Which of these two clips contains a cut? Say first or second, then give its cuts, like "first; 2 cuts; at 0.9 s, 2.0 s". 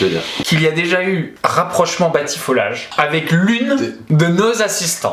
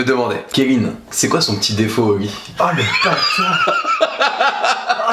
first; 3 cuts; at 1.3 s, 2.8 s, 4.0 s